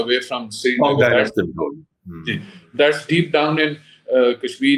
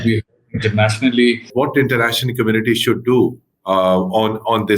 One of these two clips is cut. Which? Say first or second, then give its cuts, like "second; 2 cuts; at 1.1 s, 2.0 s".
second; 1 cut; at 1.5 s